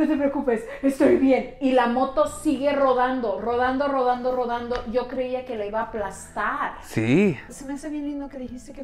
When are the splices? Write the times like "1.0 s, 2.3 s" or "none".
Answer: 7.5 s

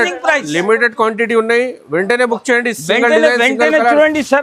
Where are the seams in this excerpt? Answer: none

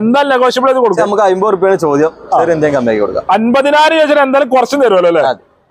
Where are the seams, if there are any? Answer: 1.0 s

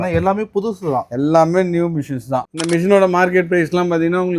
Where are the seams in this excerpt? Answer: 2.5 s

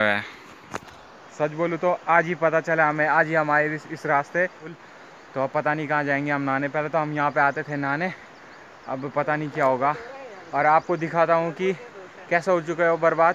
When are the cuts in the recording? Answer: 4.8 s

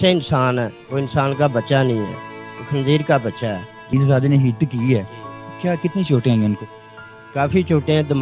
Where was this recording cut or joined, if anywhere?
3.9 s

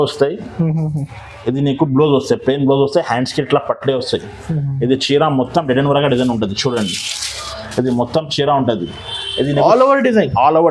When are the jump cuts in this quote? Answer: none

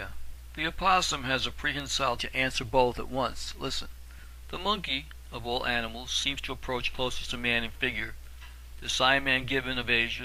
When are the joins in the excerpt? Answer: none

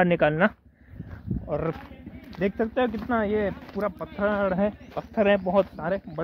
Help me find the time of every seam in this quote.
none

